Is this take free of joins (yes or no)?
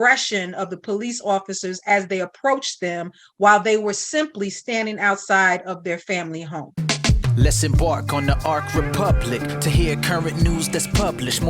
no